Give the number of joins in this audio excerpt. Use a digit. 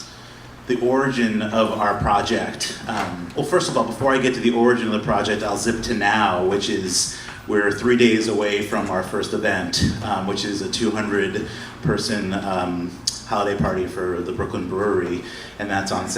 1